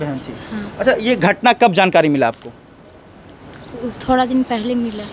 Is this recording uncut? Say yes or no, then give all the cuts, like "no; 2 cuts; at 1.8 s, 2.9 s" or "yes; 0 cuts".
yes; 0 cuts